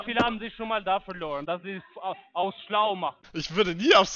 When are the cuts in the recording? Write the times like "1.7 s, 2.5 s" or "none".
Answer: 3.2 s